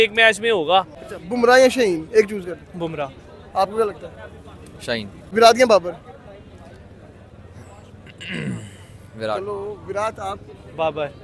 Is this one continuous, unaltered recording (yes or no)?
yes